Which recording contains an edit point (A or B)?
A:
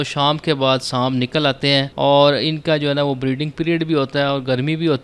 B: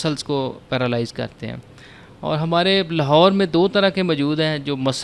A